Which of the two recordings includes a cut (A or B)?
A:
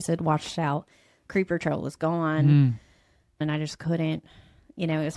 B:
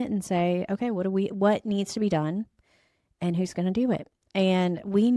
A